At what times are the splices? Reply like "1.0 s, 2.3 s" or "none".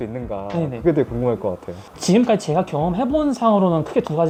none